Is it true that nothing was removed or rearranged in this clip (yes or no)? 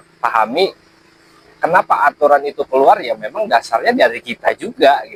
yes